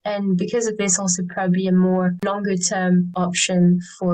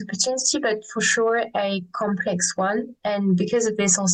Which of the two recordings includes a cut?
first; 2 cuts; at 2.2 s, 3.1 s

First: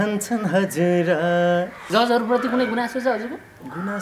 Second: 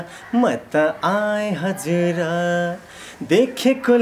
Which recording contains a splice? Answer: first; 1 cut; at 1.8 s

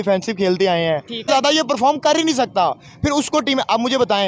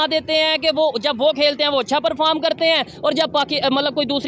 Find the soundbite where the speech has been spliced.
first; 1 cut; at 1.2 s

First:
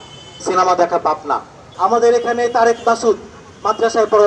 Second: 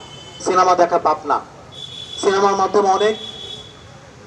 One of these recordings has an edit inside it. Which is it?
first; 1 cut; at 1.6 s

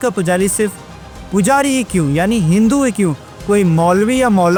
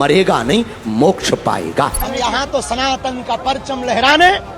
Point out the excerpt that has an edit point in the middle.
second; 1 cut; at 2.0 s

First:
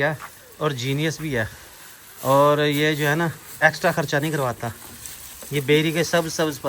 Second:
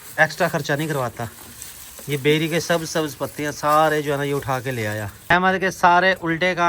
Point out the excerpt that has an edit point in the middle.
second; 1 cut; at 5.1 s

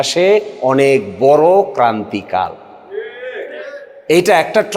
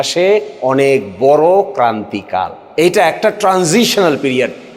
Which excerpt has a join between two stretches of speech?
second; 1 cut; at 2.6 s

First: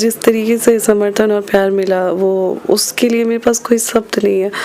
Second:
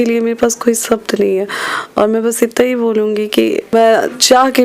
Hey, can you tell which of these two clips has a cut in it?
second; 1 cut; at 3.7 s

